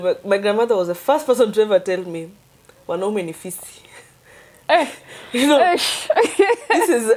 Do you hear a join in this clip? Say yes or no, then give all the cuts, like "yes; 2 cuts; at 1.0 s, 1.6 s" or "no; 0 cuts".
no; 0 cuts